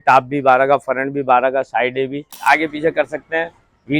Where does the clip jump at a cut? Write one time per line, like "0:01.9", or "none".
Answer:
0:02.4